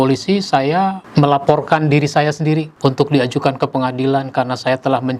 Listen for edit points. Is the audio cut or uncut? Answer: uncut